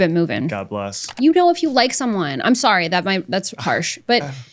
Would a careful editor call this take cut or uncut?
cut